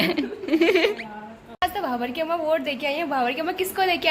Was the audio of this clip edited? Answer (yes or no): yes